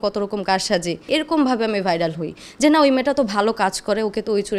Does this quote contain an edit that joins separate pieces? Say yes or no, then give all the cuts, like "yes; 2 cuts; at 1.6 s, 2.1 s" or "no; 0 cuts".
yes; 1 cut; at 1.1 s